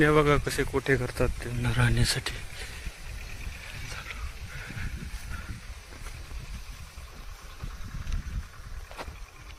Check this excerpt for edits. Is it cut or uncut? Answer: uncut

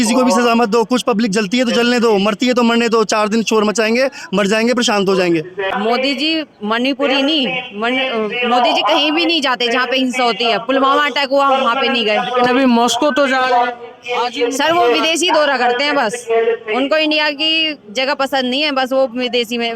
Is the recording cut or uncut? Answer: cut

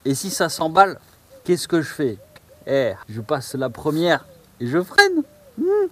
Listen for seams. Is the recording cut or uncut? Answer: cut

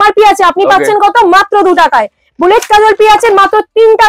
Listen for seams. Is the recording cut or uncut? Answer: uncut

